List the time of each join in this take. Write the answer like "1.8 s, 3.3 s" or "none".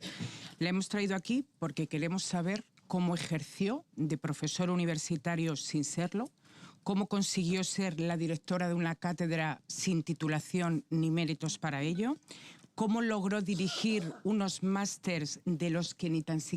none